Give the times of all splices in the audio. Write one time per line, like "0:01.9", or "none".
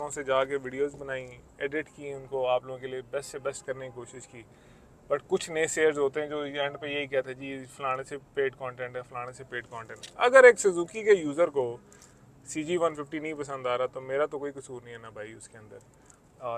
none